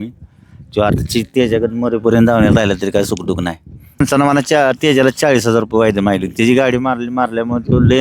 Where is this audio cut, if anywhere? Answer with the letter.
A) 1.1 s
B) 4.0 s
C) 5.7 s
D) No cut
B